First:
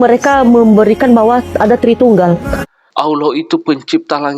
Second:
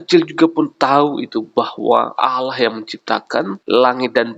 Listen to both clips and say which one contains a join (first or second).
first